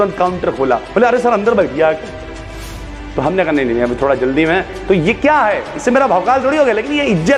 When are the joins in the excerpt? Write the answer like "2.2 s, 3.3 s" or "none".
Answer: none